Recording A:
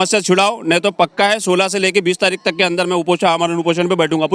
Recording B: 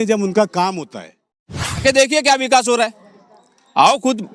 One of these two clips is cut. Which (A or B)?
B